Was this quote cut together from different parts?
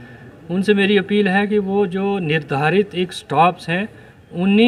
no; 0 cuts

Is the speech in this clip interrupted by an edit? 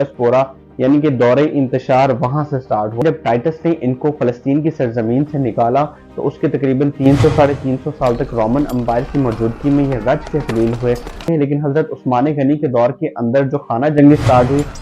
yes; 2 cuts; at 3.0 s, 11.2 s

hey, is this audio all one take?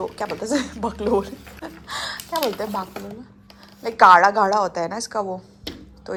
yes; 0 cuts

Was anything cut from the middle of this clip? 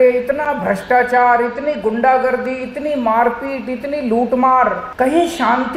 yes; 1 cut; at 4.8 s

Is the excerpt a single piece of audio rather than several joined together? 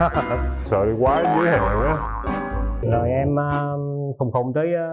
no; 1 cut; at 2.8 s

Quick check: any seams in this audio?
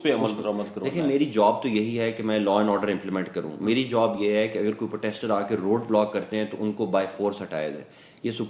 no; 0 cuts

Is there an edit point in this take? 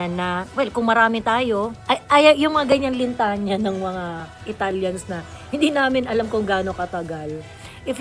yes; 1 cut; at 1.8 s

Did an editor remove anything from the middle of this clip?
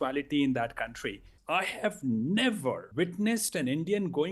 yes; 2 cuts; at 1.3 s, 2.8 s

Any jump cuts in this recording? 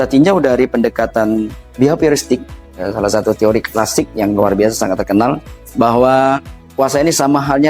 no; 0 cuts

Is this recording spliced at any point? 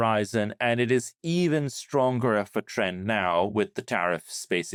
no; 0 cuts

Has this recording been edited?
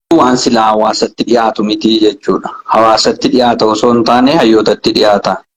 no; 0 cuts

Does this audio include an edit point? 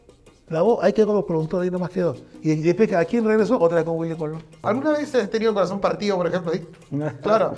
yes; 1 cut; at 4.5 s

